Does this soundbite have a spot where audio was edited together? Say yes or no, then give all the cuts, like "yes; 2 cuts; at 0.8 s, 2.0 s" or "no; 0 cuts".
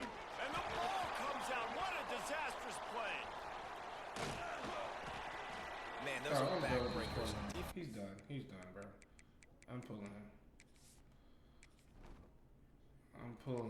no; 0 cuts